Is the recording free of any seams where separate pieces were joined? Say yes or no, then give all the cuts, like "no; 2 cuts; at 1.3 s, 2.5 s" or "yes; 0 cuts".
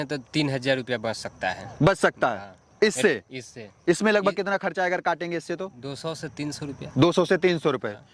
yes; 0 cuts